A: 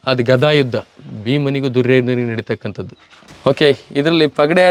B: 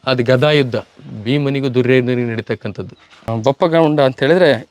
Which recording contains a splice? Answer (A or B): B